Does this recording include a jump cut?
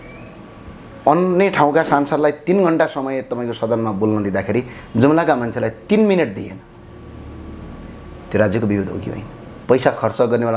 yes; 1 cut; at 9.5 s

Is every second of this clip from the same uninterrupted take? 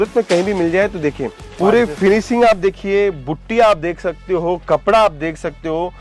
no; 1 cut; at 1.6 s

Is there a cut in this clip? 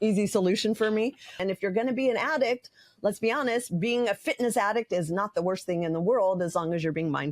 yes; 1 cut; at 1.4 s

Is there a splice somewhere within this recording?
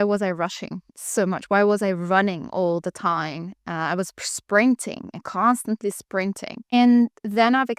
no; 0 cuts

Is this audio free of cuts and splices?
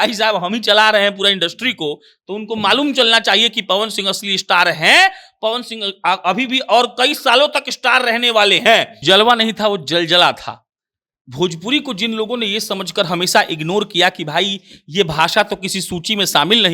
no; 1 cut; at 9.0 s

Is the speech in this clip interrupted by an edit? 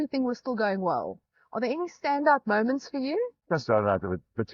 yes; 1 cut; at 3.4 s

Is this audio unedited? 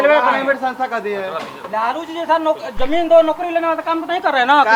yes; 0 cuts

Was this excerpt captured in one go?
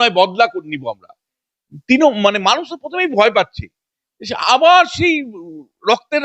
yes; 0 cuts

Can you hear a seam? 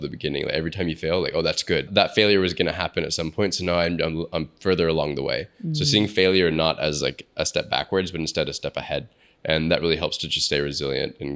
yes; 1 cut; at 1.9 s

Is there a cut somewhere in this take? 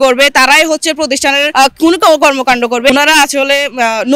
yes; 2 cuts; at 1.5 s, 2.9 s

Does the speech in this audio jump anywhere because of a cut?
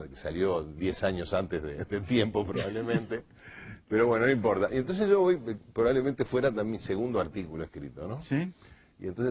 no; 0 cuts

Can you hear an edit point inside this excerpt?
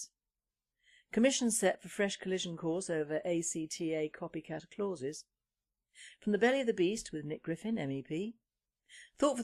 no; 0 cuts

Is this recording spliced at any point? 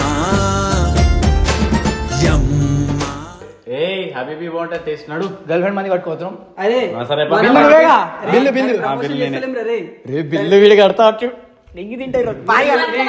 no; 0 cuts

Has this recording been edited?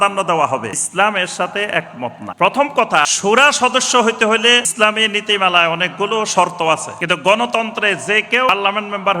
yes; 6 cuts; at 0.8 s, 2.2 s, 3.1 s, 4.7 s, 6.9 s, 8.5 s

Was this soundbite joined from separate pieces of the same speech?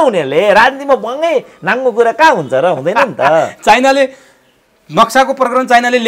no; 0 cuts

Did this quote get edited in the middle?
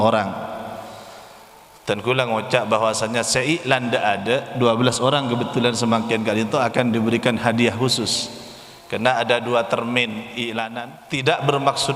yes; 1 cut; at 10.7 s

